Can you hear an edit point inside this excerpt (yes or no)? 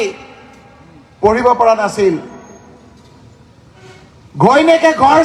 no